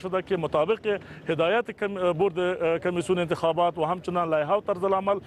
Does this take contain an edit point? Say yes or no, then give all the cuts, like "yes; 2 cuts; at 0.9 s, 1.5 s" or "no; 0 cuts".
no; 0 cuts